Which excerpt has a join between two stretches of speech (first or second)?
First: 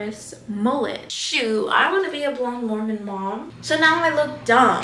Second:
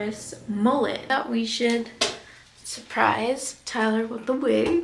first